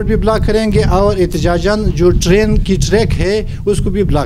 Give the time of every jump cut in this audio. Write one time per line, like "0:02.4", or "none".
none